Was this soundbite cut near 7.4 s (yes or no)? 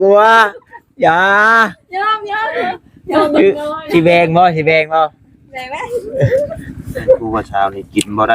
yes